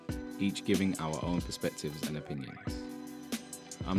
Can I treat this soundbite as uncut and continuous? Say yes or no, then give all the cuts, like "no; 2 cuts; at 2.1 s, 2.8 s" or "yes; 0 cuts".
yes; 0 cuts